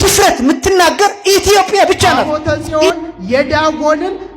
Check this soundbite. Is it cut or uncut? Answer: cut